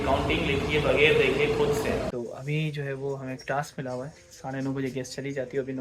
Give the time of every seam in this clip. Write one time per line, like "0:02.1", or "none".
0:02.1